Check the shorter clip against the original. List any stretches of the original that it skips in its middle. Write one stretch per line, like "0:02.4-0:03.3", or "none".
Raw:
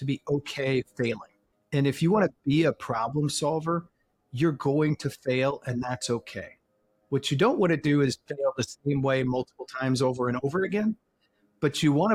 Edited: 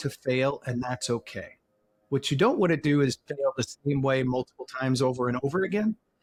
none